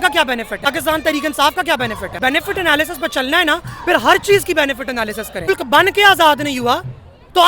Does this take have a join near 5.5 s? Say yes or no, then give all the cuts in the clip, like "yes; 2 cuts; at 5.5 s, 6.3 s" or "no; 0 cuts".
yes; 3 cuts; at 0.7 s, 2.2 s, 5.5 s